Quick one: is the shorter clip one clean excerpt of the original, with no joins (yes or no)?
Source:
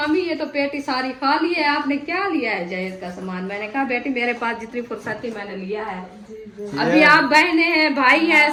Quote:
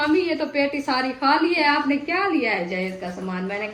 yes